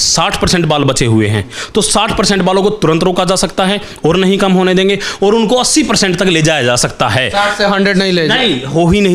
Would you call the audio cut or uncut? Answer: uncut